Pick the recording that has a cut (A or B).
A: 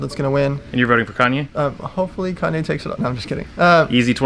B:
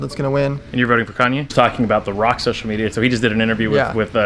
B